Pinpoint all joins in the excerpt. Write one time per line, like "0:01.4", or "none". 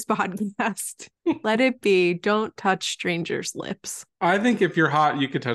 none